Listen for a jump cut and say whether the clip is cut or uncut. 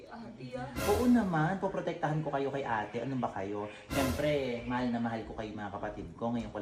uncut